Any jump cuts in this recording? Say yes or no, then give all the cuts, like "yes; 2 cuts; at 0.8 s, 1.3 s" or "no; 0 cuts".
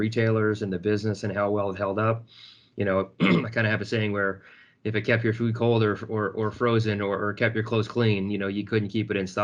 no; 0 cuts